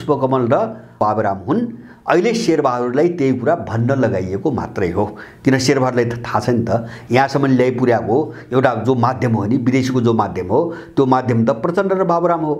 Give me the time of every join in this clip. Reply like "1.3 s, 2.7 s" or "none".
1.0 s